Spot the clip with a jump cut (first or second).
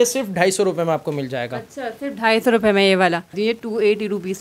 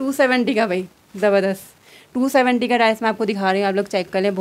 first